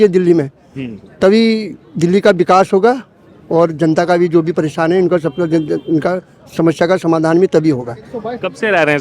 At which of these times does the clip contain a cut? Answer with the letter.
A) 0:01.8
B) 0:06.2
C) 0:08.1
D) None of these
D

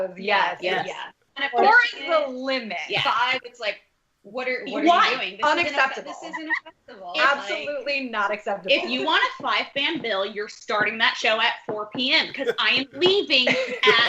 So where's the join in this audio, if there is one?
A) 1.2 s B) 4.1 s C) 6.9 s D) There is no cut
A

